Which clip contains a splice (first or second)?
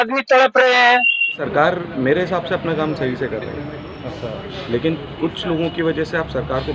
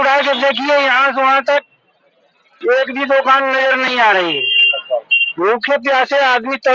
first